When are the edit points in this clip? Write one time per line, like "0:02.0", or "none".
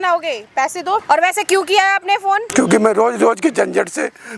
0:01.0
0:02.5

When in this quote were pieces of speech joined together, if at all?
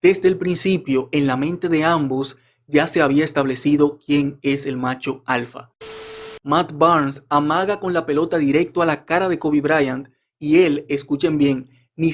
0:06.2

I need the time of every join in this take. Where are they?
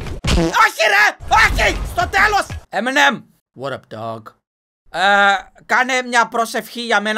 0:02.6

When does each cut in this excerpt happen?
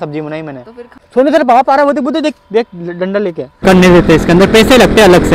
0:00.9
0:03.6

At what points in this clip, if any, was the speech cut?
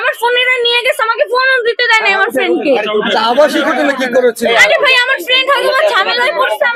none

